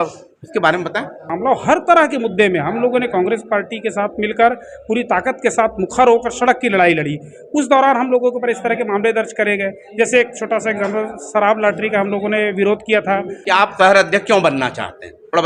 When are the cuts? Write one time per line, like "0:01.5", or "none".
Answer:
0:01.3
0:13.3